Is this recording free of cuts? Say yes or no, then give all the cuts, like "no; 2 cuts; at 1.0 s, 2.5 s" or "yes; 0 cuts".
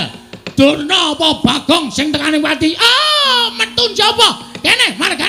yes; 0 cuts